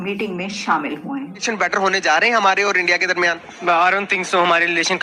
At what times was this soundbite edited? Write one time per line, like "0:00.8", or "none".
0:01.4